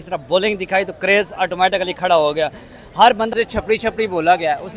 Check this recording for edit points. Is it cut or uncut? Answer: cut